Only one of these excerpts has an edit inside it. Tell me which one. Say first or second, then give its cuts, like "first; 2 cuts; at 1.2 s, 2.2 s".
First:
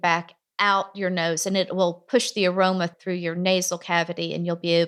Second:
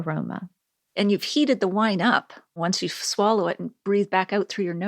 second; 2 cuts; at 1.0 s, 2.6 s